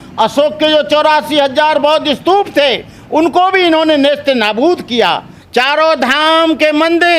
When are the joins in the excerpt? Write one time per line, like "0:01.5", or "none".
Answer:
0:05.3